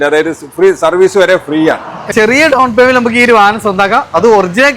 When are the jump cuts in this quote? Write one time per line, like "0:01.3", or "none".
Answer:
0:02.1